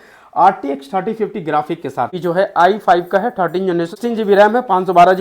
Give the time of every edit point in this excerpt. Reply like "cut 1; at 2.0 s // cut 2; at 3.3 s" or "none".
cut 1; at 2.2 s // cut 2; at 4.0 s